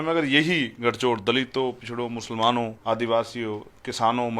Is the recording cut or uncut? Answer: cut